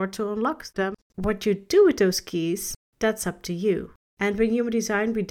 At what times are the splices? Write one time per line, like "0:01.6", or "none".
0:01.1